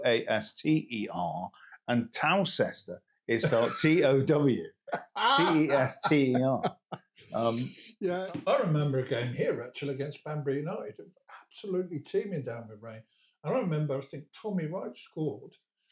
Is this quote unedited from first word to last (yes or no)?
no